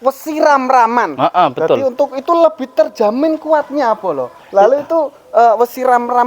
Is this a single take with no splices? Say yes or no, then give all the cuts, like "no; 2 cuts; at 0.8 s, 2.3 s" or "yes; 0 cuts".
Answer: yes; 0 cuts